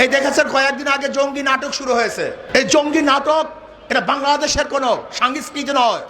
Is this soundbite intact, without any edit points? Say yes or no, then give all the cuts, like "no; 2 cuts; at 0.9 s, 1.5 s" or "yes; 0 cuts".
no; 1 cut; at 2.4 s